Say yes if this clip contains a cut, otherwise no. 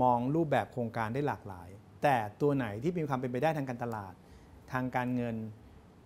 no